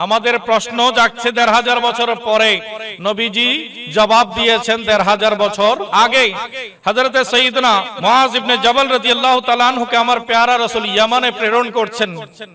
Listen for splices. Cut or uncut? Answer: cut